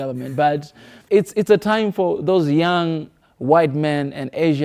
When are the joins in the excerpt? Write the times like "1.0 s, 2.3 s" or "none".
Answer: 1.0 s